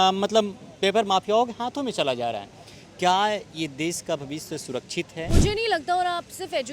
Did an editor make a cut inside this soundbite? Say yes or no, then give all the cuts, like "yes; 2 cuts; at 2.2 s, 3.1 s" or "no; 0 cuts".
yes; 1 cut; at 5.3 s